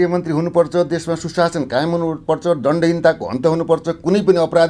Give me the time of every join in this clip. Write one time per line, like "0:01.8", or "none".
none